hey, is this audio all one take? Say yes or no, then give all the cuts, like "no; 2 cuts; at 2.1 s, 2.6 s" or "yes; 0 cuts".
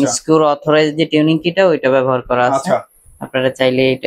yes; 0 cuts